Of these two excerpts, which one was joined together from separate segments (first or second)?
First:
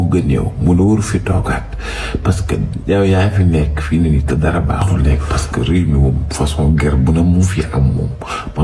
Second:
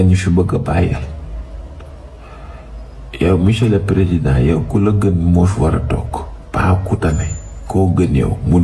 first